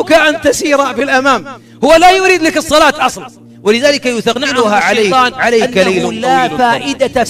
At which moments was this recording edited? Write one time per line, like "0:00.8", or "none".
0:06.1